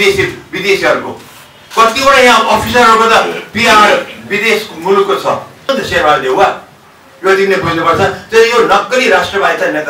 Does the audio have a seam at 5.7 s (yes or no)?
yes